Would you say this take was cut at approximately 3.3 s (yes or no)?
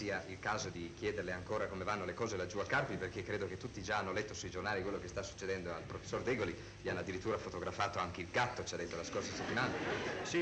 yes